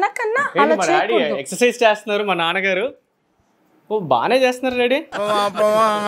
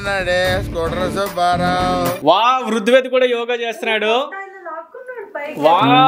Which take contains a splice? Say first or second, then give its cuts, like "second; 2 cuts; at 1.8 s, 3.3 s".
second; 1 cut; at 2.2 s